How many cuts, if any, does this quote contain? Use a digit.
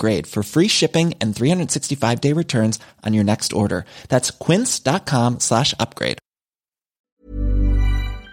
1